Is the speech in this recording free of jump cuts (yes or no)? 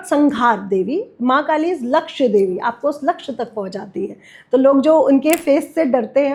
yes